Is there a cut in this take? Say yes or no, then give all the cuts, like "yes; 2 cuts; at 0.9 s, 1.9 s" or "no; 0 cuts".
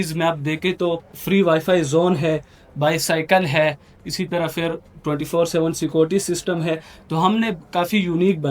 yes; 1 cut; at 1.1 s